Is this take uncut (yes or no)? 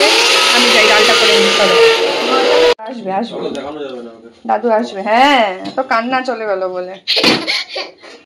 yes